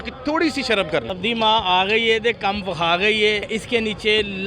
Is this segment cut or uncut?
cut